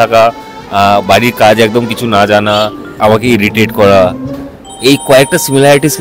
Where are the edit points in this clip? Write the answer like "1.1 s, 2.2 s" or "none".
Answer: 3.0 s